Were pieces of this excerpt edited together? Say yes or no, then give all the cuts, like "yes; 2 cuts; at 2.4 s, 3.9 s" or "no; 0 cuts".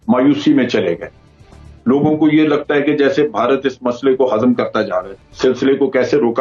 yes; 1 cut; at 5.1 s